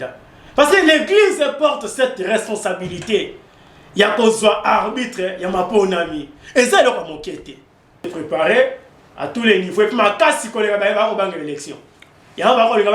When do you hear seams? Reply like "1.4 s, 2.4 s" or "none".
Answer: 8.1 s